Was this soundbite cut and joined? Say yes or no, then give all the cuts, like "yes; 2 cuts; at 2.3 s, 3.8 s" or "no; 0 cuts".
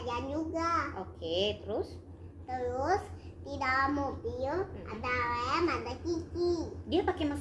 no; 0 cuts